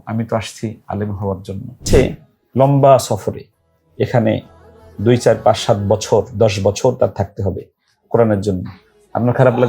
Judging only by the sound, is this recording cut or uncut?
cut